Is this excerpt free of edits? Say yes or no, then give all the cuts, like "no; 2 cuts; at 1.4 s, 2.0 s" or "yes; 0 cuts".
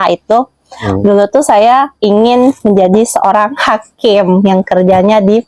yes; 0 cuts